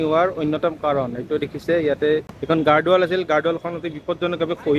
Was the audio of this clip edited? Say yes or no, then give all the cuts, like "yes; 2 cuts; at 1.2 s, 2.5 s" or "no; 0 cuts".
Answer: yes; 1 cut; at 2.3 s